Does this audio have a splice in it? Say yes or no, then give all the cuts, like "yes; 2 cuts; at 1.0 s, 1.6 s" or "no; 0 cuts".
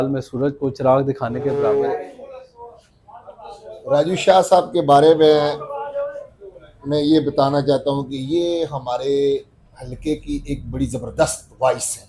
yes; 1 cut; at 1.5 s